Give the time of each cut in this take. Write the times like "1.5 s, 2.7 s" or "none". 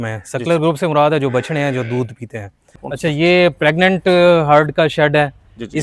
2.8 s